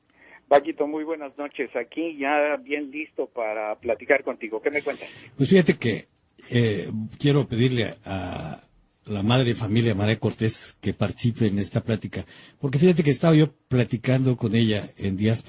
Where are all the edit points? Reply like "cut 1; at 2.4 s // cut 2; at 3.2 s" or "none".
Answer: cut 1; at 6.2 s

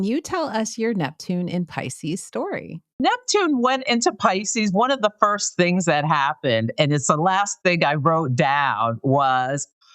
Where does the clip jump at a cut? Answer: cut 1; at 3.0 s

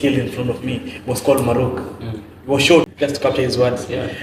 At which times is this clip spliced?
cut 1; at 2.8 s

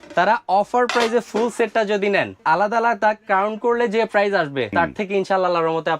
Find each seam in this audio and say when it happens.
cut 1; at 2.3 s // cut 2; at 4.7 s

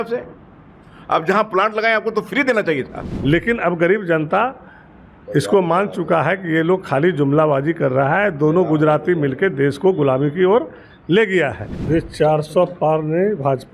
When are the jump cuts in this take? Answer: cut 1; at 3.0 s // cut 2; at 11.7 s

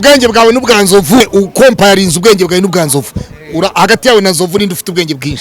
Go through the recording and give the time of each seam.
cut 1; at 1.2 s

